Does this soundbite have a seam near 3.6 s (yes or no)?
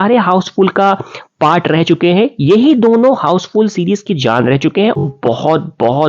no